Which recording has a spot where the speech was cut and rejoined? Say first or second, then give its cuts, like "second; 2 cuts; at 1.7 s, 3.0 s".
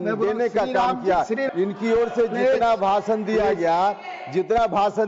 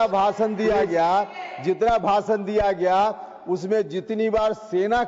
first; 1 cut; at 1.5 s